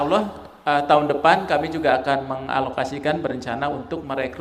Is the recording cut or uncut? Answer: uncut